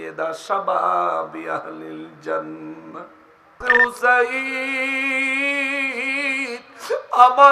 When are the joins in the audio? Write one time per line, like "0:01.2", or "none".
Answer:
0:03.6